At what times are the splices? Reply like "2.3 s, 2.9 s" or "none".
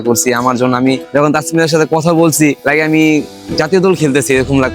1.0 s, 2.6 s